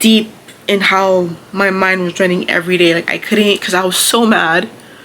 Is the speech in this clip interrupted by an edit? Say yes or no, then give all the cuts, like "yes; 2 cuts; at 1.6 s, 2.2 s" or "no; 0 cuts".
yes; 1 cut; at 3.6 s